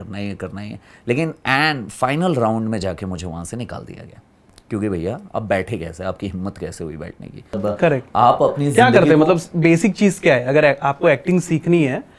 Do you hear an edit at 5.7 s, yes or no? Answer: no